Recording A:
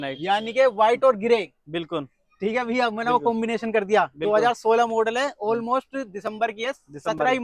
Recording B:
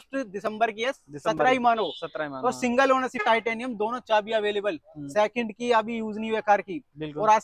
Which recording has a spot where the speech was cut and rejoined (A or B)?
B